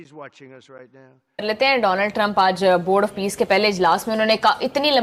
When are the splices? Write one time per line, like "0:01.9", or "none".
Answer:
0:01.4